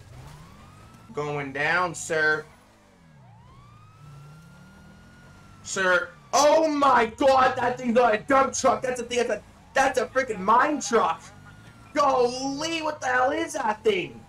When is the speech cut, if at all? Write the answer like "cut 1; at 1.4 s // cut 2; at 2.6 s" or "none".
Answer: cut 1; at 1.1 s